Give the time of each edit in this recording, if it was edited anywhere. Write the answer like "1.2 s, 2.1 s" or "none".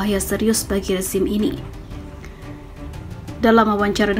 1.6 s, 3.4 s